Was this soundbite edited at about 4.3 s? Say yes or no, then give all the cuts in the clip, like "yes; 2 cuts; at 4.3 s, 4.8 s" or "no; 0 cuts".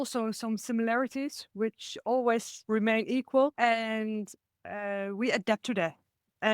no; 1 cut; at 2.5 s